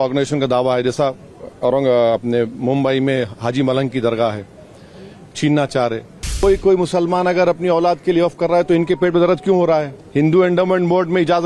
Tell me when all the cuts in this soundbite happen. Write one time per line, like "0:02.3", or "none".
0:06.4
0:10.0